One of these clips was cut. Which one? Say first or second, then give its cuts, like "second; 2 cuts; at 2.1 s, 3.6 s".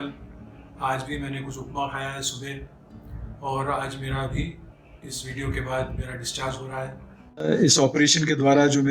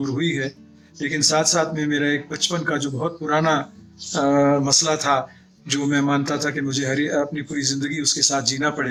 first; 1 cut; at 7.5 s